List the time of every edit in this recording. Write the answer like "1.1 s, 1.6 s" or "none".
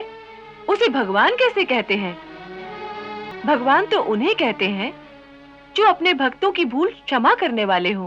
none